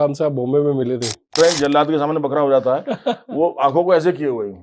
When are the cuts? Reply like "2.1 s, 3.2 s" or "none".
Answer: 1.4 s